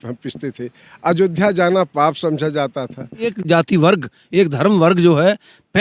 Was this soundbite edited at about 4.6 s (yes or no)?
no